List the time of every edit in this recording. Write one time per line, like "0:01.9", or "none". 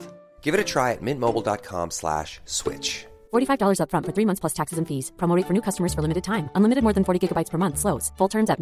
none

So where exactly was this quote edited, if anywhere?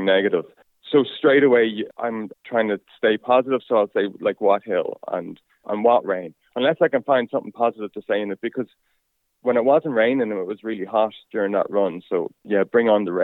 none

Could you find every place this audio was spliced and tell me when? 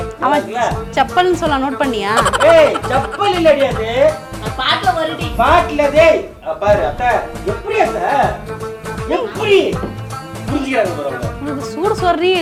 none

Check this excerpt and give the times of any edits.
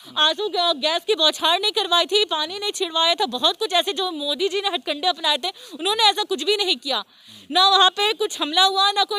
none

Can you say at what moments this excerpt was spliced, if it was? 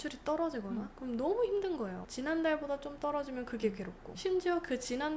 0:02.0
0:04.1

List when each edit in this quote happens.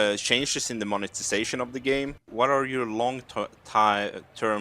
0:02.3

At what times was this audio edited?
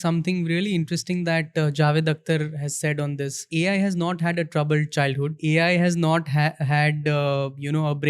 0:03.5
0:05.4

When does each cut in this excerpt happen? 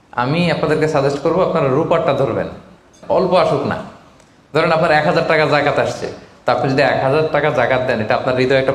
0:03.0

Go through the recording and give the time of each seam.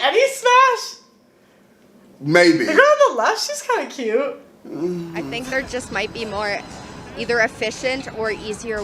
0:05.2

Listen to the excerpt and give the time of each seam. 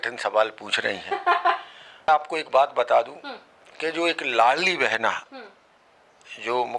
0:02.1

